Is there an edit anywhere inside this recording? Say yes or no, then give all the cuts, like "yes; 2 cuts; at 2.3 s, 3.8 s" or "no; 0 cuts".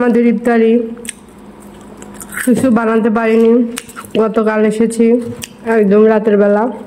no; 0 cuts